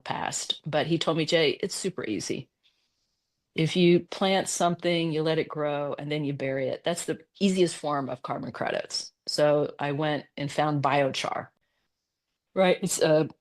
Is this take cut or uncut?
cut